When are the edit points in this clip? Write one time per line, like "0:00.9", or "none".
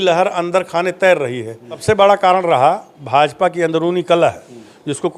0:01.8